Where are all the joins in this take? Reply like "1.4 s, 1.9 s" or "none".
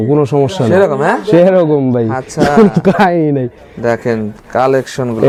none